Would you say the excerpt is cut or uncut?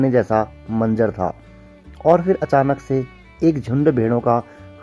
uncut